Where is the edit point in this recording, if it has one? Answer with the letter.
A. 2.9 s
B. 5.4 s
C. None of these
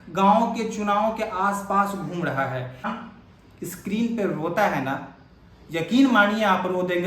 A